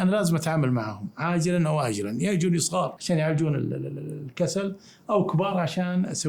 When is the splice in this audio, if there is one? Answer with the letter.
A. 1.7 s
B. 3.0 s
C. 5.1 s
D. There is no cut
B